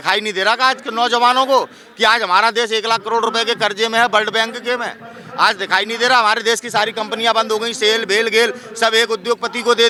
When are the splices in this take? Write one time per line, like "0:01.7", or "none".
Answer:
none